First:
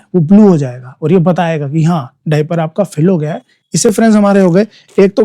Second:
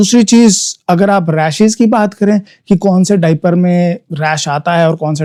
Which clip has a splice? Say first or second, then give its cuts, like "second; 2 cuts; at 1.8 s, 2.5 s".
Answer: first; 1 cut; at 3.9 s